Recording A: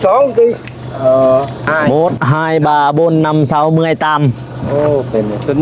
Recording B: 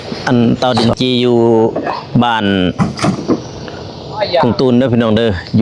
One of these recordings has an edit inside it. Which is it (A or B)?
A